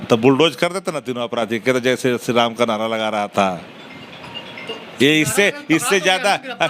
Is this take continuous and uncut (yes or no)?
yes